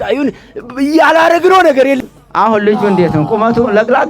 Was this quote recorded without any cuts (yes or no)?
no